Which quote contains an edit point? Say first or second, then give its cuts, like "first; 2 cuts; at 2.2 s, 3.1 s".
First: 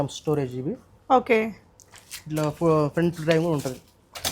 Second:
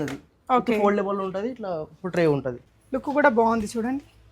second; 1 cut; at 2.6 s